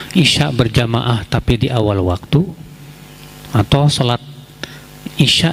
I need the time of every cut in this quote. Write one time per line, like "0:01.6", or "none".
none

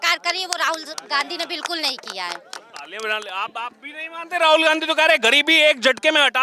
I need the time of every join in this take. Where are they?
none

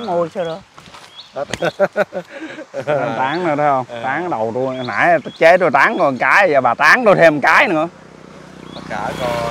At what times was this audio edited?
none

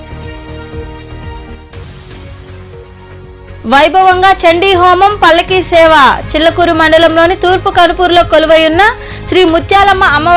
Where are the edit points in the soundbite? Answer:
0:01.4

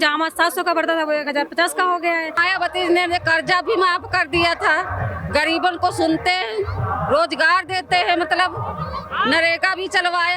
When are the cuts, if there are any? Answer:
0:02.5

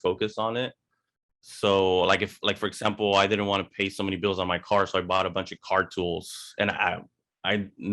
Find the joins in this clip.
none

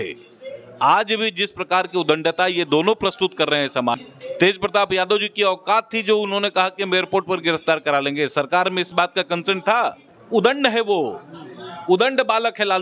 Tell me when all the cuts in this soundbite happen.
0:04.0
0:10.1

